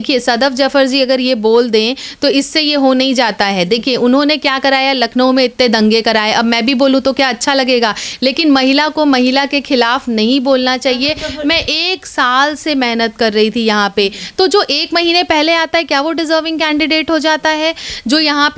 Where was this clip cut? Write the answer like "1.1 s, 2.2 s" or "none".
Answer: none